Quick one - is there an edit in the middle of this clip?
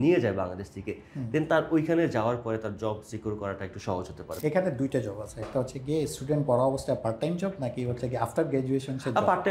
yes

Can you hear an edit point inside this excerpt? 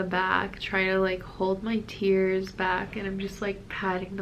no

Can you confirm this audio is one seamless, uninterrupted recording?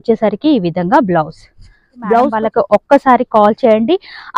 no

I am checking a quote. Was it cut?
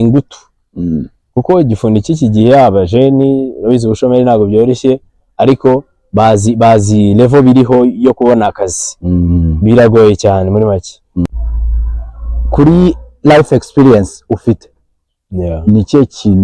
yes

